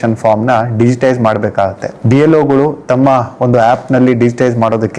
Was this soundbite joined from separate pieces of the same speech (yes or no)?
no